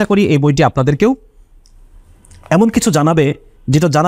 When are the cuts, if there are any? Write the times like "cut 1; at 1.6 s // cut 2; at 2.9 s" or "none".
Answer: none